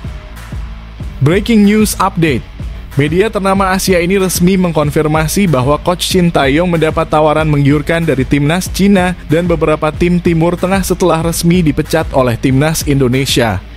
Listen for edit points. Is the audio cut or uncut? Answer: cut